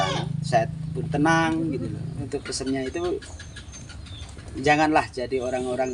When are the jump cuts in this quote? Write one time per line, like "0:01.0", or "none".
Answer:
0:02.3

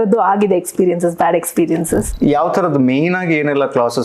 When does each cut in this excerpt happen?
0:02.1

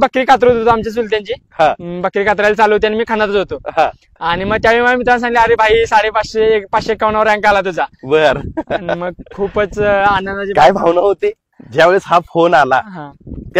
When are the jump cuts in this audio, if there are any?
none

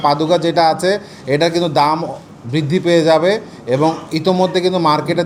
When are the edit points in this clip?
none

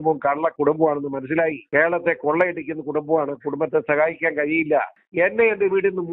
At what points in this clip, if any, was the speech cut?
none

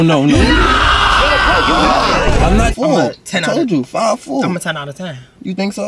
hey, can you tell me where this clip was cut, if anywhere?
0:02.7

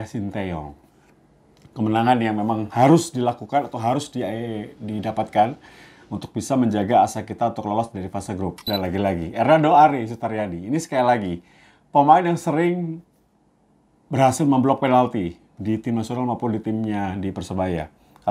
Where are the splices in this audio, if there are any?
0:08.6

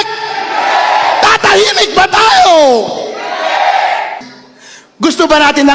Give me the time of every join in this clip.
0:04.3

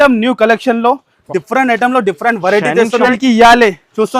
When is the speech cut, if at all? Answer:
0:03.1

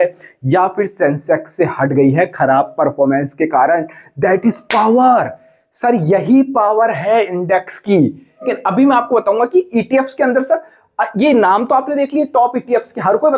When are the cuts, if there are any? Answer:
0:08.5

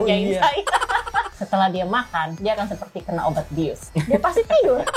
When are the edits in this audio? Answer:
0:01.4
0:02.3
0:03.9

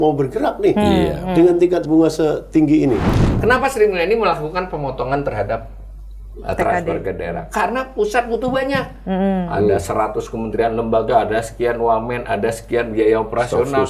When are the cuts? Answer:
0:03.4

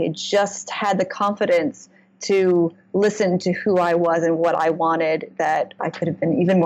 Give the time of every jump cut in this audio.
0:05.7

